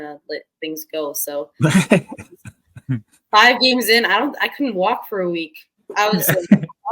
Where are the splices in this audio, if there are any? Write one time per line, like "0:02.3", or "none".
none